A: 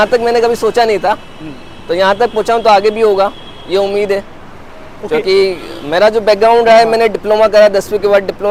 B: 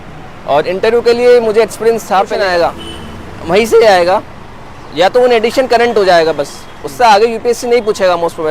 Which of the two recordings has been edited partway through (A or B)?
B